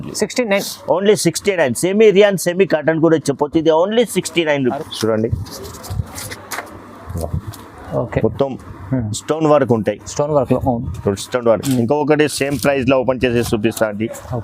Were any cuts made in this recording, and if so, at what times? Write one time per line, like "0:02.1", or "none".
0:04.8